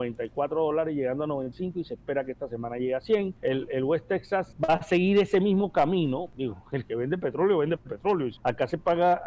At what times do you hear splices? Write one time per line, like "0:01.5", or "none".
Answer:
0:01.5
0:03.3
0:04.5
0:06.3
0:08.3